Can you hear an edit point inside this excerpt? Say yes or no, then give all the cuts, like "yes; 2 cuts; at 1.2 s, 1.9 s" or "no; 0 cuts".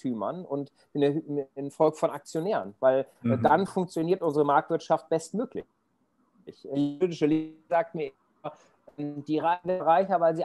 no; 0 cuts